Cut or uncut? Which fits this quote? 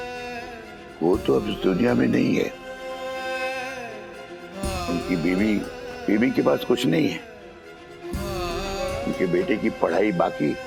uncut